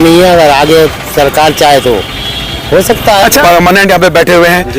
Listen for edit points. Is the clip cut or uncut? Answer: cut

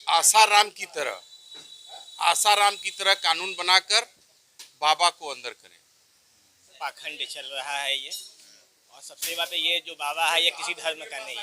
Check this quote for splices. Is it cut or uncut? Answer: cut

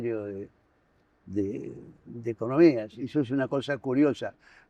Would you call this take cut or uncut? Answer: cut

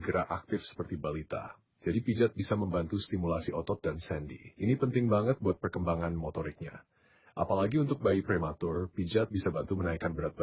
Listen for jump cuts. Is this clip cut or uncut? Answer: uncut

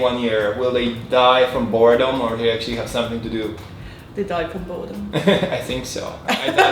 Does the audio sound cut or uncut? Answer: uncut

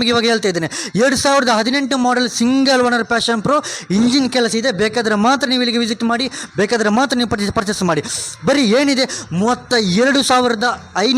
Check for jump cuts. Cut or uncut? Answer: uncut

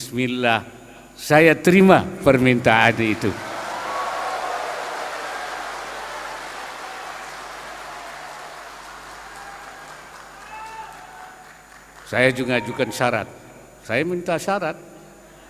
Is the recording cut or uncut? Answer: uncut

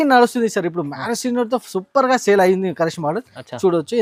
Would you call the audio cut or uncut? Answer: uncut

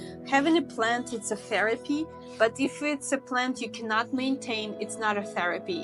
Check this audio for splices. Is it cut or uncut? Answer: uncut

